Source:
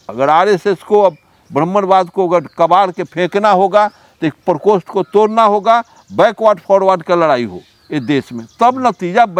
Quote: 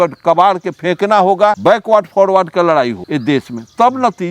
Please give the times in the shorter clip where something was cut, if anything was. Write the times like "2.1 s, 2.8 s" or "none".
1.6 s, 3.0 s